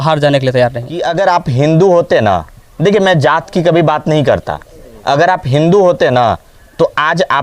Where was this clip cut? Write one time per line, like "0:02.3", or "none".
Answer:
0:01.1